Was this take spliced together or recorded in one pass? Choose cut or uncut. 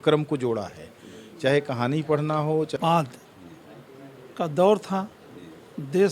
cut